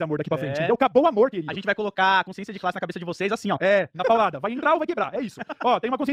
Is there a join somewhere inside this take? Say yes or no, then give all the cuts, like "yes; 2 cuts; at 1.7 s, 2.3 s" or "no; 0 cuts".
no; 0 cuts